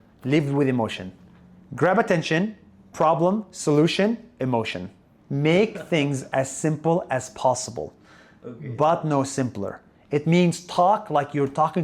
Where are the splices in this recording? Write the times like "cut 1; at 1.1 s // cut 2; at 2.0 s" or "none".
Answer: cut 1; at 5.2 s